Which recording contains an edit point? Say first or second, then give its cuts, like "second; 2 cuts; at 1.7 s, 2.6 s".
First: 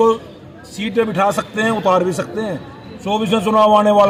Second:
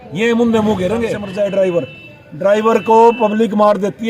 second; 1 cut; at 1.2 s